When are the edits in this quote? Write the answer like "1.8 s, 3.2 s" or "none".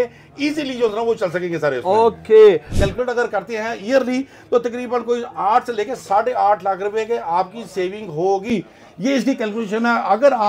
2.8 s